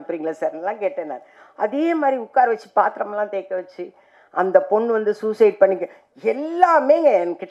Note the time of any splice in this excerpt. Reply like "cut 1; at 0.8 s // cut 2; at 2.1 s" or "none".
none